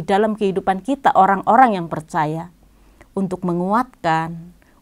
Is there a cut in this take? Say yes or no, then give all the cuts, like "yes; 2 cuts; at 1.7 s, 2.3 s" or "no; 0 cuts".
no; 0 cuts